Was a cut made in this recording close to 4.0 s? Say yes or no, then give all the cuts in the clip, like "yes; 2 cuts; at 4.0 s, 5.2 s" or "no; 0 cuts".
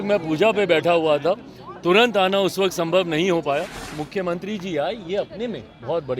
yes; 1 cut; at 4.0 s